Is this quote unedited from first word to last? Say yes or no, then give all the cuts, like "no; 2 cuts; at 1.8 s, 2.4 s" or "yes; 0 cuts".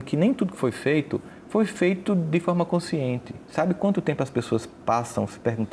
yes; 0 cuts